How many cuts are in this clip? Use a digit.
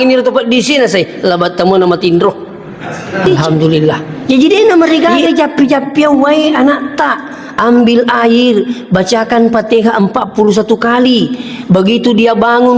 1